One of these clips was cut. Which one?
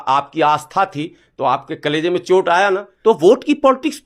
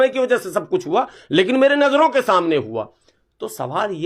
first; 1 cut; at 2.9 s

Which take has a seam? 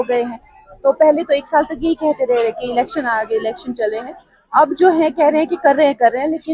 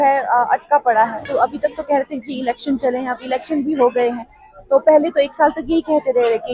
second; 1 cut; at 1.2 s

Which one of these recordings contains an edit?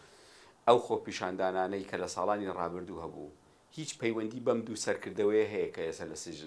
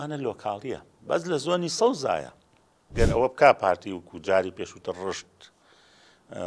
second; 1 cut; at 2.9 s

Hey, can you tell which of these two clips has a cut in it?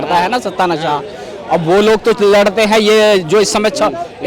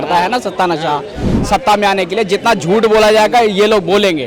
second; 1 cut; at 1.3 s

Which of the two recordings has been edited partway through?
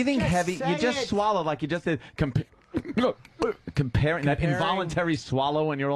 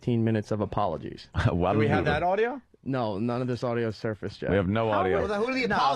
second; 1 cut; at 3.6 s

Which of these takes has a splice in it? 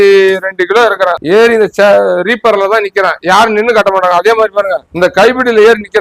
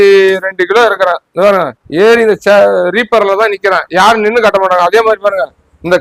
first; 2 cuts; at 1.2 s, 4.8 s

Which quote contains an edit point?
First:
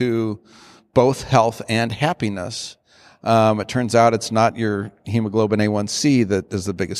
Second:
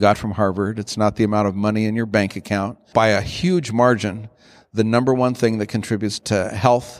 second; 2 cuts; at 2.8 s, 6.2 s

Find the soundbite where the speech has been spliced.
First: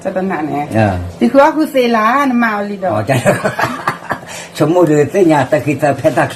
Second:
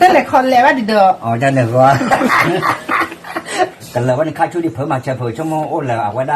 second; 1 cut; at 3.7 s

